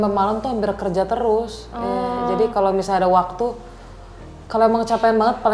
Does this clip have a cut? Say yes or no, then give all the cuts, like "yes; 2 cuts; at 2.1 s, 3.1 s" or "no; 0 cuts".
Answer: no; 0 cuts